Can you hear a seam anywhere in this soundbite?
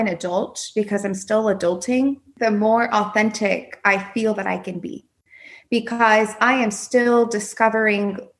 yes; 1 cut; at 2.3 s

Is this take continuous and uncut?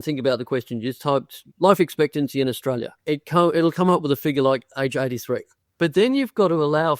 no; 2 cuts; at 2.9 s, 5.6 s

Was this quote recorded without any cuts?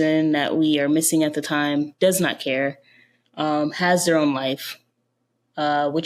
yes; 0 cuts

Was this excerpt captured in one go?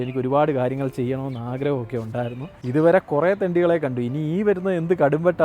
no; 1 cut; at 2.6 s

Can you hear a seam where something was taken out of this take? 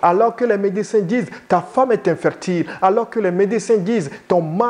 no; 0 cuts

